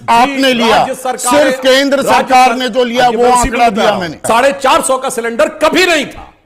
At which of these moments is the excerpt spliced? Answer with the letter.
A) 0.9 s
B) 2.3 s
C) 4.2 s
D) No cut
C